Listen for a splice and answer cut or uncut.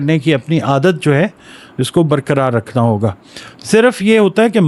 uncut